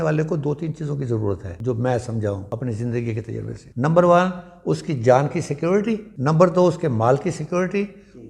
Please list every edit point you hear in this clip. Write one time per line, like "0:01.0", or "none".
0:01.5
0:02.4
0:03.6
0:06.1

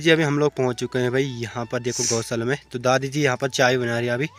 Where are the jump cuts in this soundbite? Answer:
none

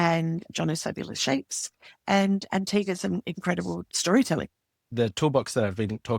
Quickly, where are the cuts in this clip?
0:04.8

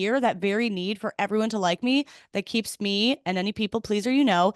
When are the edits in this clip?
none

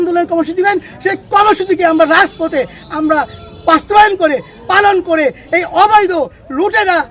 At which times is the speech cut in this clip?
none

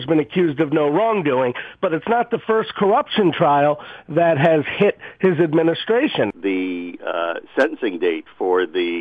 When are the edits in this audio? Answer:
0:06.3

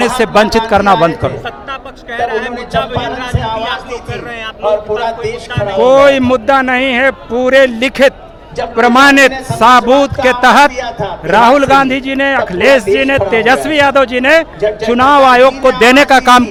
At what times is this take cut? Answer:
none

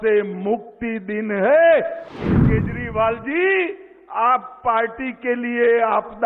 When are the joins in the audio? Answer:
0:02.3

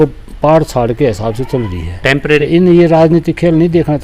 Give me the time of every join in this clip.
0:02.4

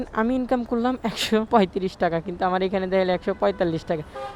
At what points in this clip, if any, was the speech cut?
0:01.5

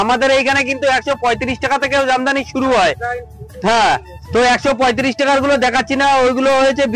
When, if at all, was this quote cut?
none

